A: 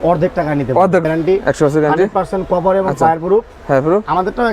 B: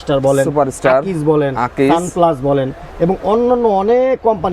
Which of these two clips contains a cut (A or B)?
A